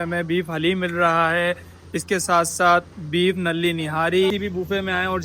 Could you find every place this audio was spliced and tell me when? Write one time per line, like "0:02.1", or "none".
0:04.3